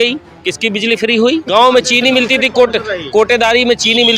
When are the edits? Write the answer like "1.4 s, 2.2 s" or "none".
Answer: 1.5 s